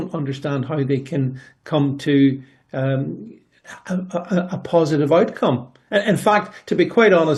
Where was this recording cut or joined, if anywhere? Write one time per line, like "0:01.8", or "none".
none